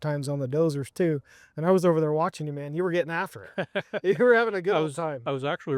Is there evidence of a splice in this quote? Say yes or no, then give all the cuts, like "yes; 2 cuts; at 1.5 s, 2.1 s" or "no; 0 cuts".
no; 0 cuts